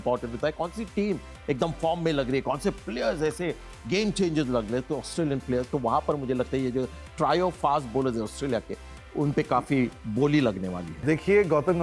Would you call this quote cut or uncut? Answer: cut